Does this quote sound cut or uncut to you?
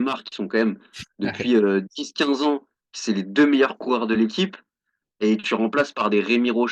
uncut